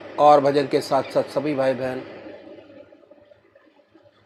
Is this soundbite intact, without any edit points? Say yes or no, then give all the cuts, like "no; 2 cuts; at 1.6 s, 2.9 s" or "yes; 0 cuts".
yes; 0 cuts